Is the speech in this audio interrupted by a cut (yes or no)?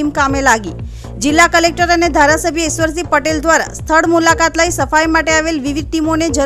no